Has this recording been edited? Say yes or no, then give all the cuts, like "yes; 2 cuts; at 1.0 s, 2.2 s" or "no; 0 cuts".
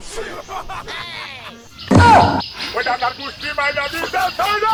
no; 0 cuts